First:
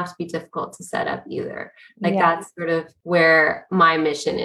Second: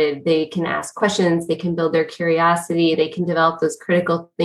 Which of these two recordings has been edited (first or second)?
first